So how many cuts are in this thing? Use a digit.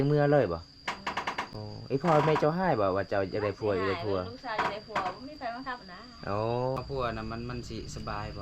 1